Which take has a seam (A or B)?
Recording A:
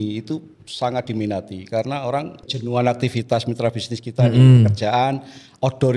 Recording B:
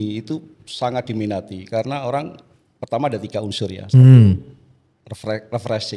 A